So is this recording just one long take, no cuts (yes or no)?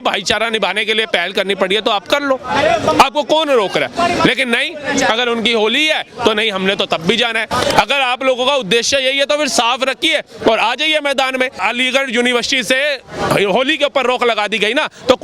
no